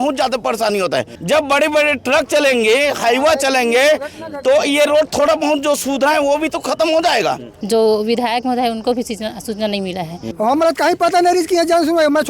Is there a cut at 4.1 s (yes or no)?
no